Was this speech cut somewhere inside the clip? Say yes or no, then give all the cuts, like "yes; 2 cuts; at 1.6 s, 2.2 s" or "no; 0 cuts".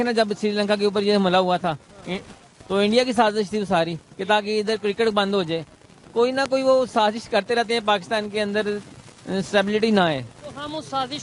no; 0 cuts